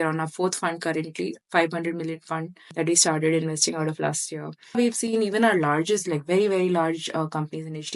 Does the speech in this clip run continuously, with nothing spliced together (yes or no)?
no